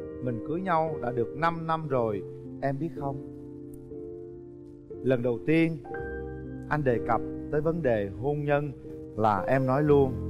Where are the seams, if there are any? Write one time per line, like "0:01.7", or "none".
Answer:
none